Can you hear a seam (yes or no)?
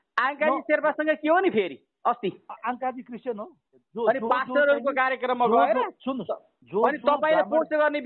yes